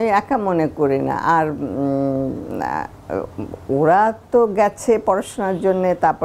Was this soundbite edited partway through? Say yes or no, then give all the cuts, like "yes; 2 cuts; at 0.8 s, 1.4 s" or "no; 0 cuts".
no; 0 cuts